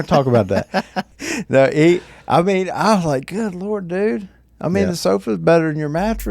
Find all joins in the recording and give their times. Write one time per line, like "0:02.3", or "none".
0:01.1